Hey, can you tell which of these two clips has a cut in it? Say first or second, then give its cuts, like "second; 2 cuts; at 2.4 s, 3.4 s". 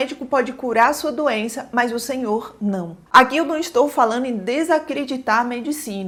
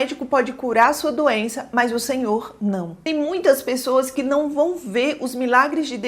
second; 1 cut; at 3.0 s